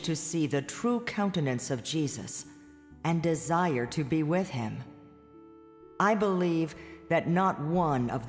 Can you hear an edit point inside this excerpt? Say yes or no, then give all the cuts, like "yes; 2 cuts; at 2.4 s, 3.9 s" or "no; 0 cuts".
no; 0 cuts